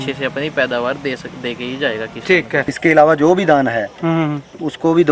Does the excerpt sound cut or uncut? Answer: cut